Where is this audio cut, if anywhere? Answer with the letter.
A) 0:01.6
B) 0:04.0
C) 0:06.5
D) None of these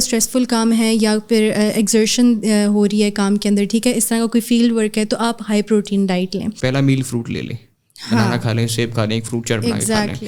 C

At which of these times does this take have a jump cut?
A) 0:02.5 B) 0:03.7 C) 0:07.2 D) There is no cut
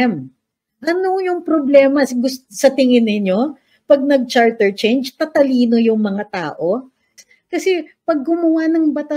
C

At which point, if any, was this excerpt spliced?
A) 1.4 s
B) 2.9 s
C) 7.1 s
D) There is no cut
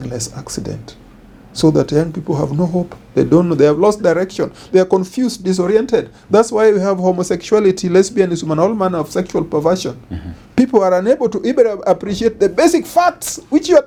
D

